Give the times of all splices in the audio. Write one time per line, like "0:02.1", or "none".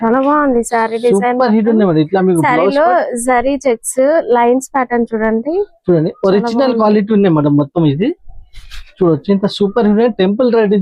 none